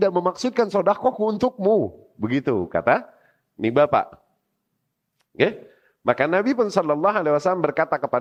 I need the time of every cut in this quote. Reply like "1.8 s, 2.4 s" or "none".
none